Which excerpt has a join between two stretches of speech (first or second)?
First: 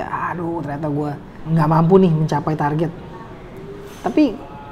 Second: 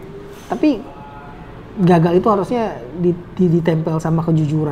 first